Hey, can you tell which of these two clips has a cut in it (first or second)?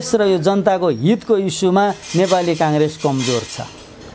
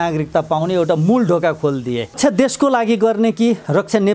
second